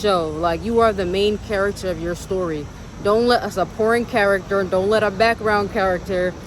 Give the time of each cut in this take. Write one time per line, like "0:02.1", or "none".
none